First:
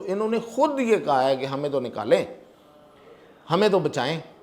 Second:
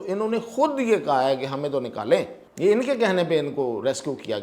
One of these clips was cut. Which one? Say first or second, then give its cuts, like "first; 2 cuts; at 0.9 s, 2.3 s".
second; 1 cut; at 2.4 s